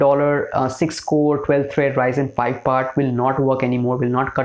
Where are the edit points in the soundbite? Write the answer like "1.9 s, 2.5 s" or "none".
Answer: none